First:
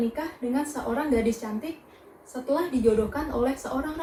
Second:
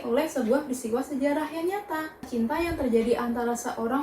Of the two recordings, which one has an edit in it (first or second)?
second